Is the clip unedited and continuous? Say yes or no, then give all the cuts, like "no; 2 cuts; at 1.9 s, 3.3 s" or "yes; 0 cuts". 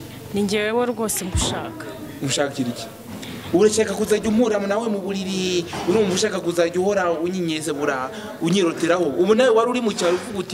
yes; 0 cuts